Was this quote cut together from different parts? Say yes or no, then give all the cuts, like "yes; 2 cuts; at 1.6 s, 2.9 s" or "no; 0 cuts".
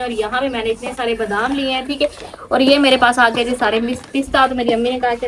no; 0 cuts